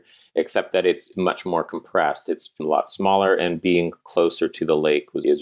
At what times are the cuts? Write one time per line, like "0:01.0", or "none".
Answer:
none